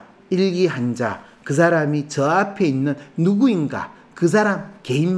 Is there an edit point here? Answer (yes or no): no